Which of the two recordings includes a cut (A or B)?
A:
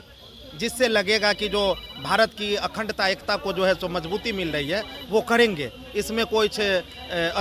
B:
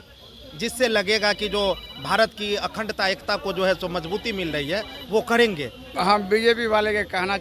B